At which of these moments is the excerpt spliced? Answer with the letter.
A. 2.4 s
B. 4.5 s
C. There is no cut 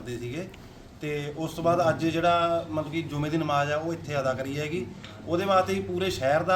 C